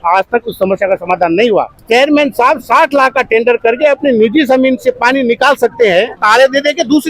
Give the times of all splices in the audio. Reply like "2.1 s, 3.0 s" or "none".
1.8 s, 6.2 s